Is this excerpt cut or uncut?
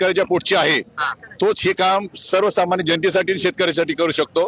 uncut